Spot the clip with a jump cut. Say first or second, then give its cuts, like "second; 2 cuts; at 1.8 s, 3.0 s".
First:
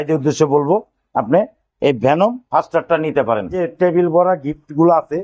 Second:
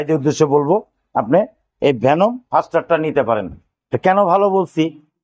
first; 1 cut; at 3.6 s